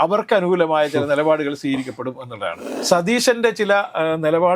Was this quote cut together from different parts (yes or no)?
yes